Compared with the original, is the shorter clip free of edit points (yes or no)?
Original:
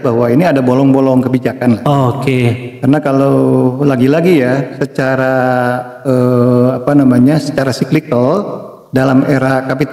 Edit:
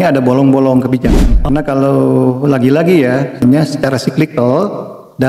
no